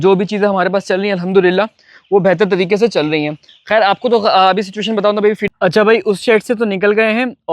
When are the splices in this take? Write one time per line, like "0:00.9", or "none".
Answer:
0:05.5